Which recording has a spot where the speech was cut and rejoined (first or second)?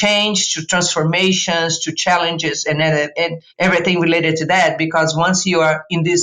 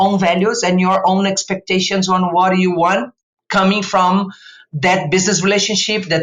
first